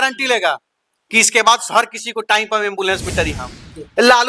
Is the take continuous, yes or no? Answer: no